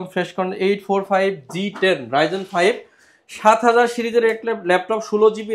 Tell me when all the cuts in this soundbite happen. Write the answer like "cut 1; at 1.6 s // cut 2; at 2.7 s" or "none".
none